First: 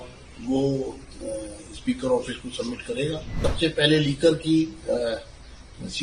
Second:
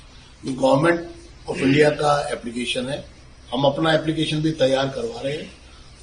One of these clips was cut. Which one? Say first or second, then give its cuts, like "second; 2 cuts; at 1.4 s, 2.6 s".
first; 1 cut; at 3.4 s